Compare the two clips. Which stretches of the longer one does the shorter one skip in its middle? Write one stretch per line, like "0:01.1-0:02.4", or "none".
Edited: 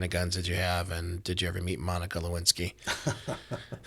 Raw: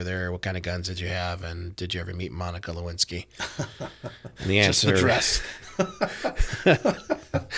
none